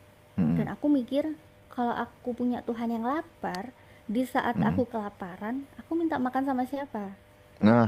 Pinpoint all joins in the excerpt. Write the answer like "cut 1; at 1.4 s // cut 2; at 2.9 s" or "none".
none